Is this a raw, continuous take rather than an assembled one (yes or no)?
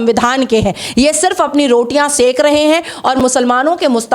yes